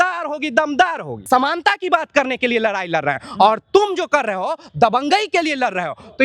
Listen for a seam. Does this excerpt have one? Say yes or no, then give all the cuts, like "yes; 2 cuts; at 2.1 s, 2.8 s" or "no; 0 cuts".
yes; 1 cut; at 1.1 s